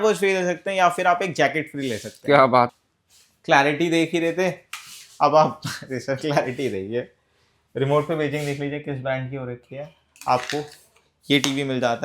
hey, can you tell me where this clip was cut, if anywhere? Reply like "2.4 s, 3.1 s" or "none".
2.7 s